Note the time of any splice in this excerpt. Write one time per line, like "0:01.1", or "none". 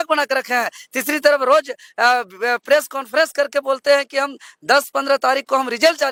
none